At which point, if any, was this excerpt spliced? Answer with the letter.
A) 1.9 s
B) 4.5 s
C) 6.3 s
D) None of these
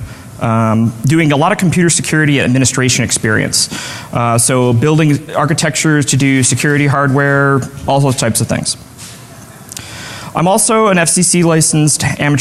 A